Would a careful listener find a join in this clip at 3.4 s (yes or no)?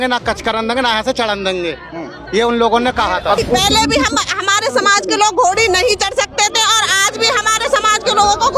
yes